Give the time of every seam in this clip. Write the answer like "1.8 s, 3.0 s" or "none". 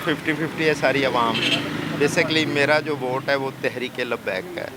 none